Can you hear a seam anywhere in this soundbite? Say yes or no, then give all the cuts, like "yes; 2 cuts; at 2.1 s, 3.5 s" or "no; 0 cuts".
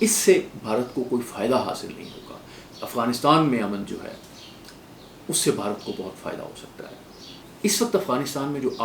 yes; 2 cuts; at 2.7 s, 7.2 s